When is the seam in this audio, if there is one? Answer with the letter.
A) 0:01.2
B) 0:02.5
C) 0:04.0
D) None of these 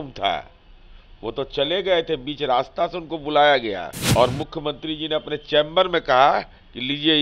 C